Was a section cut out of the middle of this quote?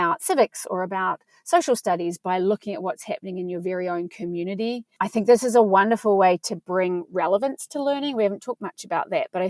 no; 0 cuts

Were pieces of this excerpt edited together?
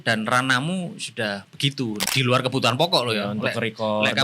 yes; 1 cut; at 2.1 s

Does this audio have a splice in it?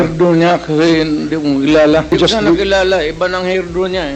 yes; 1 cut; at 2.1 s

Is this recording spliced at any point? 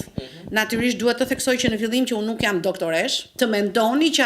yes; 1 cut; at 3.3 s

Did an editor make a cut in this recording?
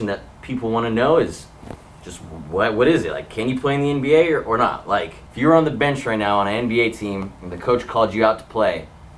yes; 1 cut; at 5.2 s

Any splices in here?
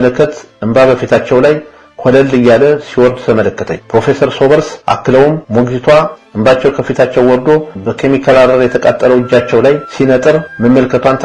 no; 0 cuts

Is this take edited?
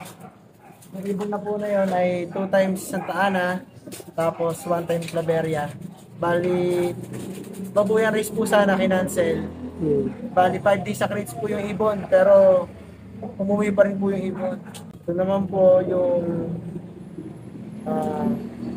no; 0 cuts

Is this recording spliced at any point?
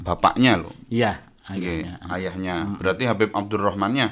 no; 0 cuts

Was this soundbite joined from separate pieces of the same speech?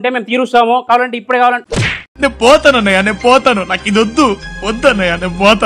no; 0 cuts

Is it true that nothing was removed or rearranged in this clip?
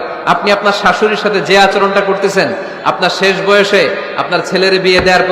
yes; 0 cuts

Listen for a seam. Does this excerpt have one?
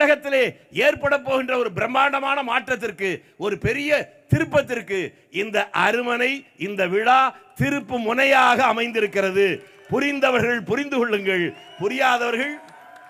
no; 0 cuts

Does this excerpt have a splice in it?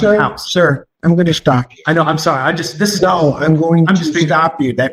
no; 0 cuts

